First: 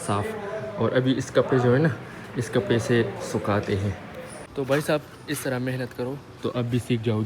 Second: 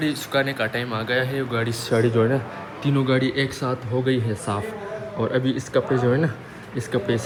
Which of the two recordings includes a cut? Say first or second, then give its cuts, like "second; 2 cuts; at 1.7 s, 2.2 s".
first; 1 cut; at 4.1 s